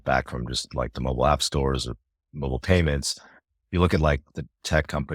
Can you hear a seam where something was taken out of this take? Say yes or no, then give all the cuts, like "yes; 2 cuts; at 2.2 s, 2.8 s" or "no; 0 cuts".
no; 0 cuts